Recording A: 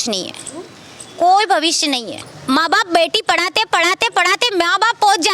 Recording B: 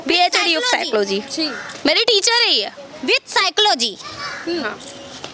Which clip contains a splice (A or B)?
A